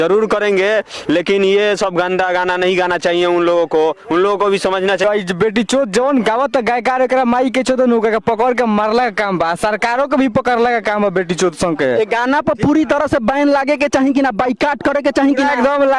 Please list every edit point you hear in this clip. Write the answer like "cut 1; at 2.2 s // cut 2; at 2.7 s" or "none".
cut 1; at 5.0 s